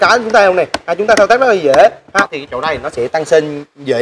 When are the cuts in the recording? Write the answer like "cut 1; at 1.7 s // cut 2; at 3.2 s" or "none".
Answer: cut 1; at 2.0 s